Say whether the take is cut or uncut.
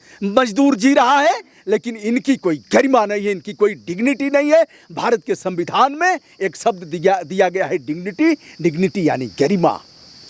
uncut